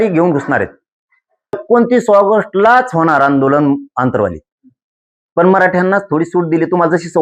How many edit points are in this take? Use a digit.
1